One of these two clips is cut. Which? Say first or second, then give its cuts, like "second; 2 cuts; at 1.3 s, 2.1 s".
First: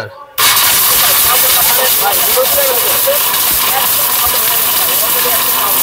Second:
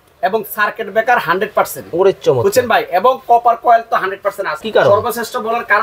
second; 1 cut; at 4.5 s